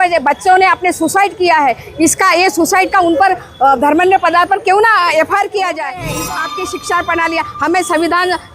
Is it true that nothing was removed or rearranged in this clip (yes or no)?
no